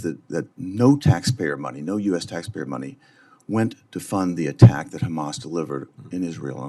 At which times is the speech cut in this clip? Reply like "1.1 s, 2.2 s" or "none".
none